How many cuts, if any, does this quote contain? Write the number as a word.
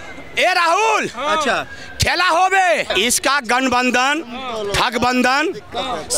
one